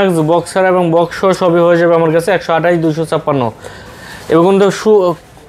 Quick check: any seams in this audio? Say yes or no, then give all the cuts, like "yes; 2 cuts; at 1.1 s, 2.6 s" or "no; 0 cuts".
no; 0 cuts